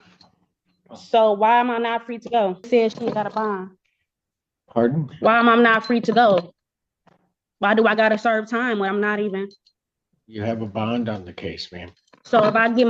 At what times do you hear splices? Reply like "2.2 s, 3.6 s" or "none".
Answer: 2.7 s